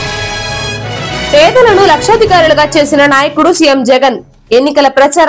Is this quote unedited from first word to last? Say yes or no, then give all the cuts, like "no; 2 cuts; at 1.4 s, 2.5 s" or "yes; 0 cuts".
yes; 0 cuts